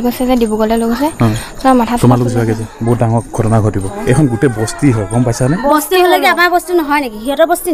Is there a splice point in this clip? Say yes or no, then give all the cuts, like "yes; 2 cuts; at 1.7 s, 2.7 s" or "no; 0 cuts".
yes; 1 cut; at 3.9 s